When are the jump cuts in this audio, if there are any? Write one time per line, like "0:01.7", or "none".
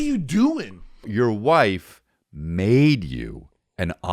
0:01.1